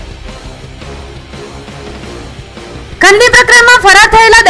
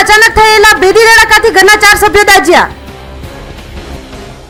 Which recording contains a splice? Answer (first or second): first